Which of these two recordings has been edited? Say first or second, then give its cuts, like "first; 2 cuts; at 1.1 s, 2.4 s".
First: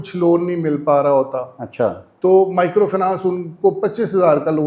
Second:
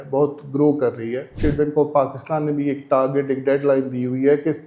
second; 1 cut; at 1.3 s